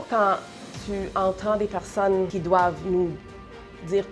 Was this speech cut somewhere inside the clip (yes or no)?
yes